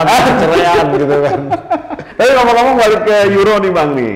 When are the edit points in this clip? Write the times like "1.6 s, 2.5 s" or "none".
2.0 s